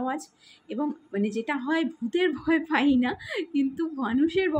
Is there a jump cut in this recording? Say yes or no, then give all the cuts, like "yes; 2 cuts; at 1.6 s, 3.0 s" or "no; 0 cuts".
no; 0 cuts